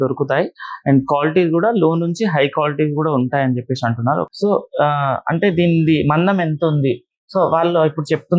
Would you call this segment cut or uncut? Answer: cut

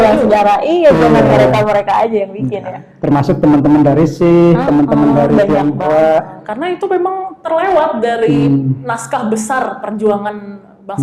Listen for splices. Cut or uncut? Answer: uncut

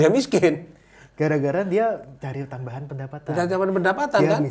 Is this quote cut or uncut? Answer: uncut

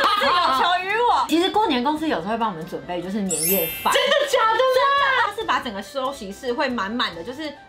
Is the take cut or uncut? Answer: cut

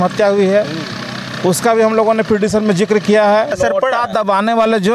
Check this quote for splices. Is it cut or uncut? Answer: cut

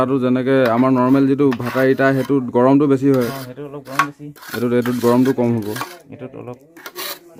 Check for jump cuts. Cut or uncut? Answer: uncut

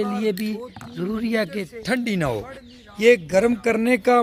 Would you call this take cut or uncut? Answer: uncut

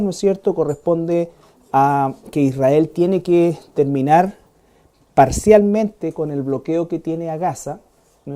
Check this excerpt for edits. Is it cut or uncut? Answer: uncut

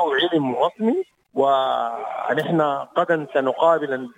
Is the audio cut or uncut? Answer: cut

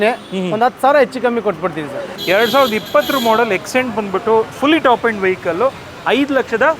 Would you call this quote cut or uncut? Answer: cut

